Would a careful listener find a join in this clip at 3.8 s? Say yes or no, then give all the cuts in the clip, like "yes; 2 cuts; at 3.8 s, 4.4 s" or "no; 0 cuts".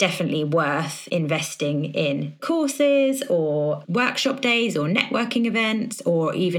yes; 3 cuts; at 1.0 s, 2.4 s, 3.8 s